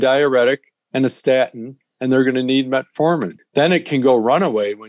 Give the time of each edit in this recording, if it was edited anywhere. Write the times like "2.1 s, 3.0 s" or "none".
3.4 s